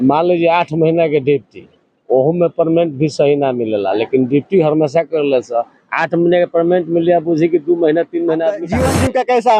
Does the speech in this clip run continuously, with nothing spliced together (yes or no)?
no